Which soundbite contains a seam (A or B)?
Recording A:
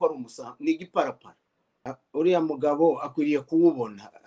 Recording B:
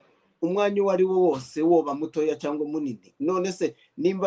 A